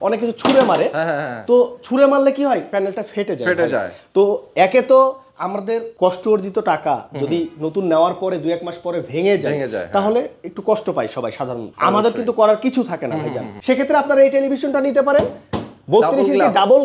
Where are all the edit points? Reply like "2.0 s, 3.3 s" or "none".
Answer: none